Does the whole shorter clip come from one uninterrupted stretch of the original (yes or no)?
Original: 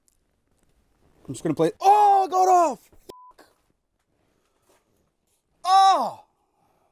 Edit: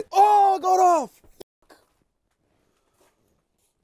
yes